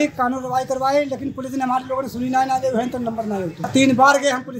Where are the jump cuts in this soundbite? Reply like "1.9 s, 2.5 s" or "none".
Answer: 3.7 s